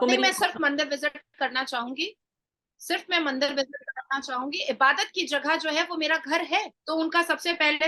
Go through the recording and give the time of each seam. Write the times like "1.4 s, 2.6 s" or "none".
6.8 s